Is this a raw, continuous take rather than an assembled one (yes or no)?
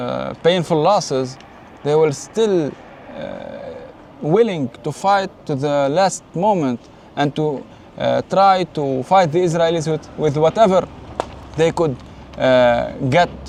yes